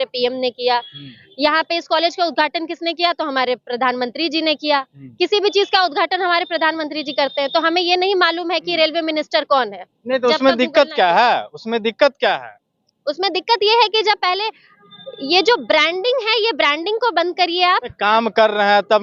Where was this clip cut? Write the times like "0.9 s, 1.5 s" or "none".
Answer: none